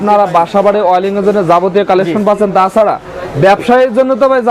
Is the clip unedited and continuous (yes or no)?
yes